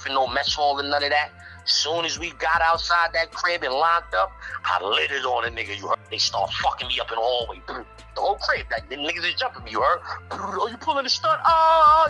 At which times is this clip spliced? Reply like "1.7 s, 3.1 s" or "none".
6.0 s